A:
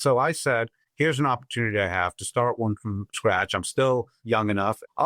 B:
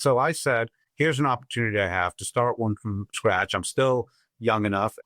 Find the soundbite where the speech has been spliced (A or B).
A